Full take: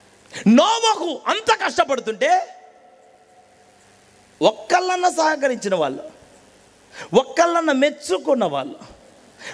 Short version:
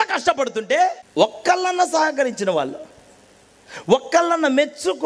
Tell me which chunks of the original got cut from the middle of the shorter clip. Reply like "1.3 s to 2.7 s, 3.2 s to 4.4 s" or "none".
2.5 s to 4.3 s